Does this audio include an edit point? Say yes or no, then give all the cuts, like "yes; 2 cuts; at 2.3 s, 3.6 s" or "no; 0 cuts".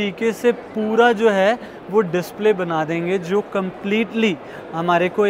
no; 0 cuts